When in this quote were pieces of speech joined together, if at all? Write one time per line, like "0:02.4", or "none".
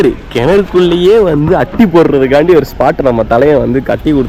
none